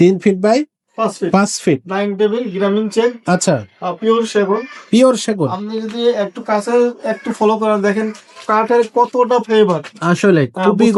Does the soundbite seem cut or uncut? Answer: uncut